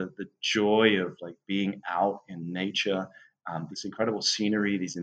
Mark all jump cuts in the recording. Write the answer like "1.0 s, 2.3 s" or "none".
3.7 s